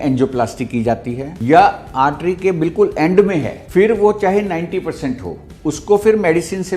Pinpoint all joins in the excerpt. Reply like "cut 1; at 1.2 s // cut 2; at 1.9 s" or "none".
cut 1; at 1.3 s // cut 2; at 3.6 s

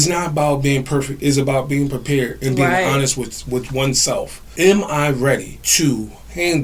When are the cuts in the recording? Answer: cut 1; at 4.5 s // cut 2; at 5.6 s

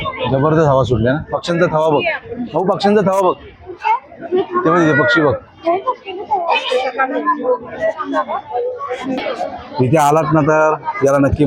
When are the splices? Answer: cut 1; at 9.2 s

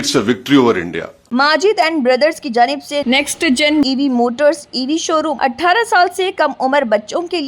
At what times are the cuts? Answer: cut 1; at 1.2 s // cut 2; at 5.3 s

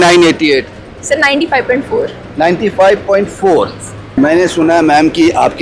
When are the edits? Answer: cut 1; at 4.1 s

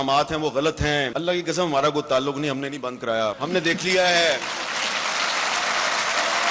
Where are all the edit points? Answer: cut 1; at 1.1 s // cut 2; at 3.4 s

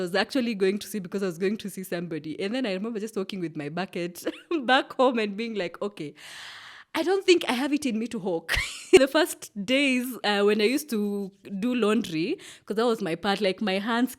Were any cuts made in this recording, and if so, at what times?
cut 1; at 9.0 s

